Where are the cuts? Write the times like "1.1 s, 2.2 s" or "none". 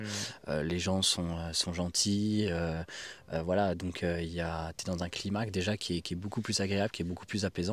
none